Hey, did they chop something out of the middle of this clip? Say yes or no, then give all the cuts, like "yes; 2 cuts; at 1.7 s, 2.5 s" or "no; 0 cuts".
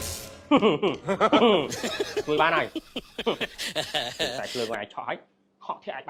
no; 0 cuts